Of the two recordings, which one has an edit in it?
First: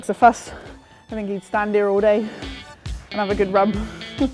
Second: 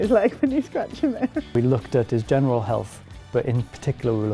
second; 1 cut; at 1.5 s

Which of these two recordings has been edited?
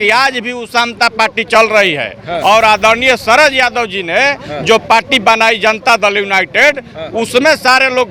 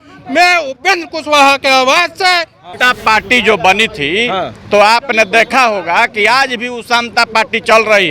second; 1 cut; at 2.8 s

